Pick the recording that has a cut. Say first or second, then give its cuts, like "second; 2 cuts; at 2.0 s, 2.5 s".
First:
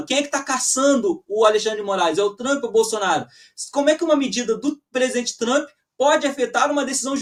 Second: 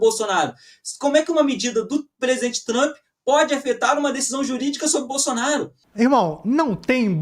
second; 1 cut; at 5.8 s